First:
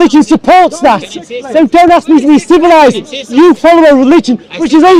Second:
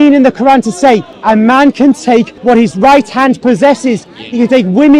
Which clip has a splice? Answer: second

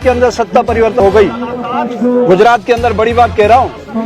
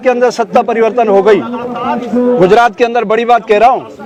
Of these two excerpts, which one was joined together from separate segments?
first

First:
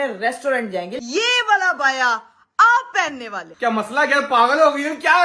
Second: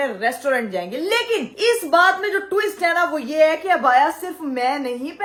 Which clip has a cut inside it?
first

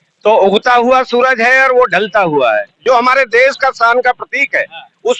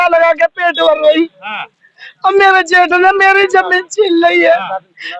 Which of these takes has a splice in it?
first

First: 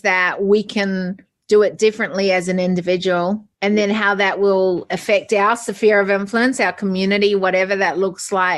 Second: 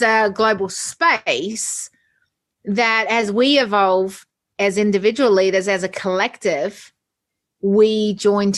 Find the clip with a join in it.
first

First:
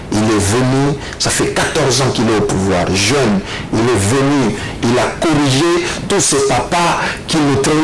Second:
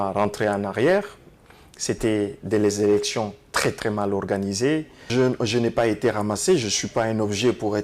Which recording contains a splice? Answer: second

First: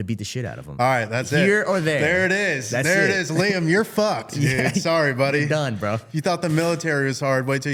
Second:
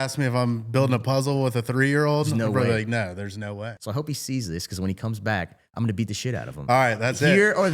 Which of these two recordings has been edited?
second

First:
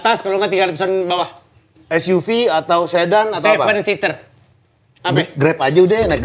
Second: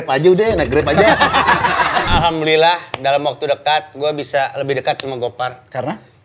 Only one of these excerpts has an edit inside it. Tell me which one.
second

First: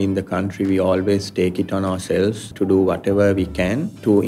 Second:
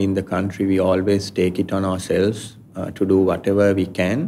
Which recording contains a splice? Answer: first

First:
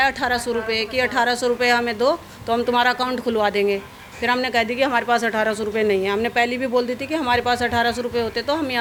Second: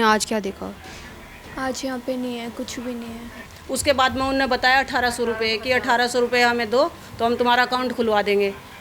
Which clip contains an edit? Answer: second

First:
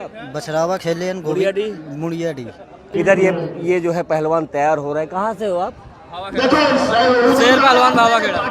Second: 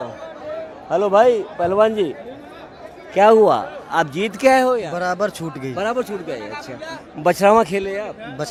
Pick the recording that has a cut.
first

